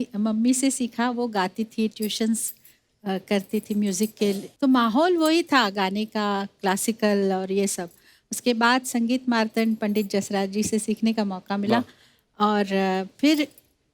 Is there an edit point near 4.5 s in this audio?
yes; 1 cut; at 4.5 s

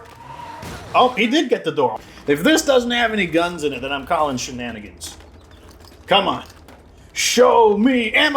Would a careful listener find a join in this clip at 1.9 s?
yes; 1 cut; at 1.9 s

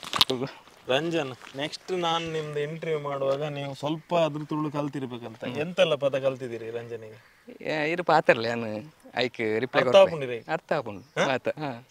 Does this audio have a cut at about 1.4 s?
yes; 1 cut; at 1.4 s

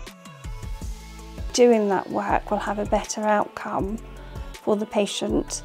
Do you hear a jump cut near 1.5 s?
yes; 1 cut; at 1.5 s

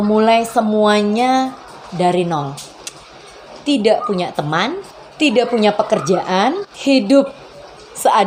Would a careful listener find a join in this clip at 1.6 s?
no; 0 cuts

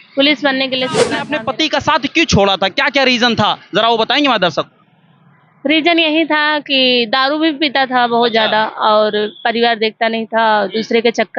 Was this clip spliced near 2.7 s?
no; 1 cut; at 1.2 s

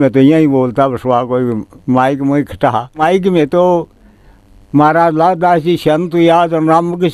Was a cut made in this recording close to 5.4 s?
no; 1 cut; at 2.9 s

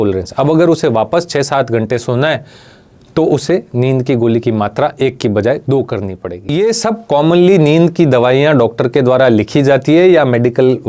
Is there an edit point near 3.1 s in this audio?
no; 1 cut; at 6.5 s

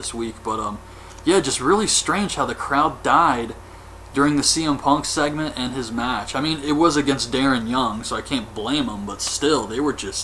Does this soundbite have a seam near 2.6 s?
yes; 1 cut; at 2.6 s

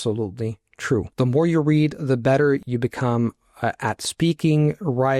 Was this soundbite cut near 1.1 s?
yes; 2 cuts; at 1.1 s, 2.7 s

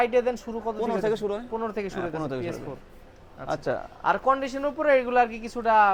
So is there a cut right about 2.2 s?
no; 0 cuts

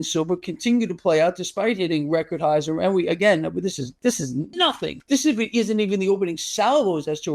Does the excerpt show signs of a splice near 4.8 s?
yes; 1 cut; at 4.8 s

